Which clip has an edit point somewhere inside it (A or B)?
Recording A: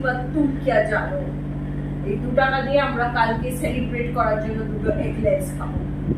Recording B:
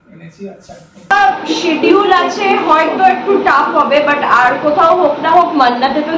B